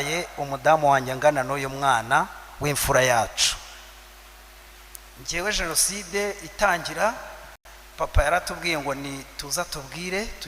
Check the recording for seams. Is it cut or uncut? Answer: cut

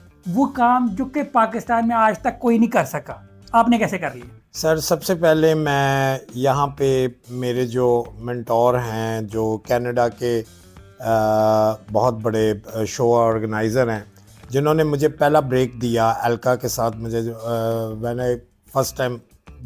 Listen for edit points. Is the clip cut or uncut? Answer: uncut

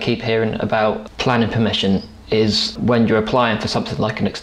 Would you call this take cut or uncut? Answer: cut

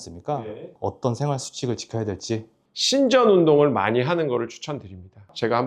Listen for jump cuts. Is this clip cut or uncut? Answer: cut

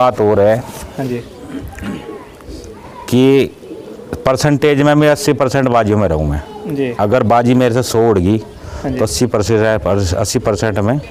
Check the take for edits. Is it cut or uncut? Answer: uncut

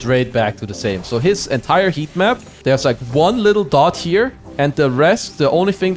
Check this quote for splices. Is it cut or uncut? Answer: cut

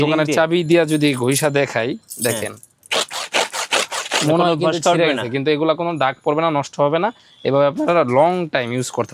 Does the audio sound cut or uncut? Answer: uncut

